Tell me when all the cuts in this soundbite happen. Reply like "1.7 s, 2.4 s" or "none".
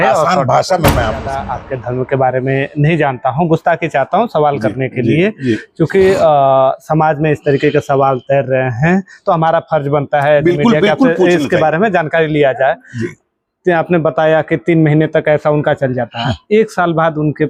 1.4 s